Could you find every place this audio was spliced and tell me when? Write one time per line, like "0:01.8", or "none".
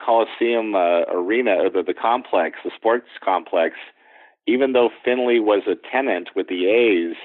none